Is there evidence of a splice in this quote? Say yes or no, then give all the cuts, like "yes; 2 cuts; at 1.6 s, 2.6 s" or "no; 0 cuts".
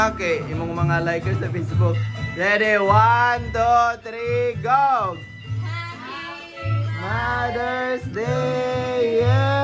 no; 0 cuts